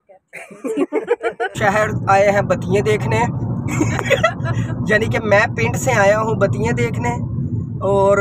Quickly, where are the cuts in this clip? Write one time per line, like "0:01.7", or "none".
0:01.5